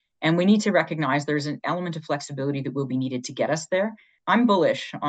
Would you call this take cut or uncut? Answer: cut